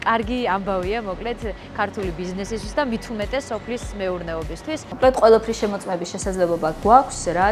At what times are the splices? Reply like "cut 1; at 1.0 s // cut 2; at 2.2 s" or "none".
cut 1; at 4.9 s